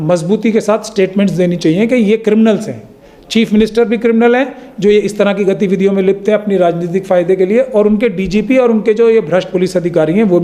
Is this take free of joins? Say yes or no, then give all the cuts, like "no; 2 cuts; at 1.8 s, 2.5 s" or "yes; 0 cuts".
yes; 0 cuts